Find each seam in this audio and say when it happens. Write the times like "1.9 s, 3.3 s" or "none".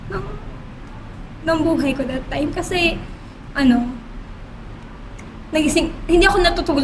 none